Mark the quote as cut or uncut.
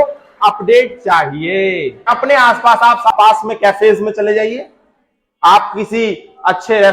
cut